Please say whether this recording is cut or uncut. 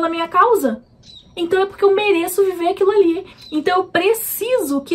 cut